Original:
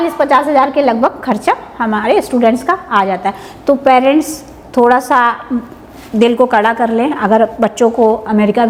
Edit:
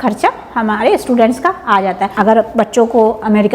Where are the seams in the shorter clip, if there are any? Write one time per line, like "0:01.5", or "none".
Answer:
0:02.1